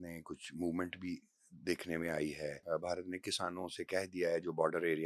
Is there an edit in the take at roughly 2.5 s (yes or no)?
yes